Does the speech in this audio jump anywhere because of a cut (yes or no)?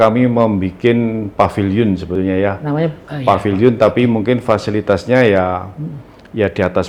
no